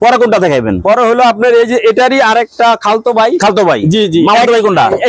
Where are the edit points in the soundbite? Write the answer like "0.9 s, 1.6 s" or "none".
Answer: none